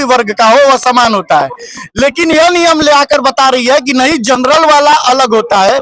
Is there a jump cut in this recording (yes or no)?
no